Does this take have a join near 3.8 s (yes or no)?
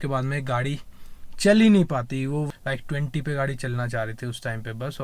no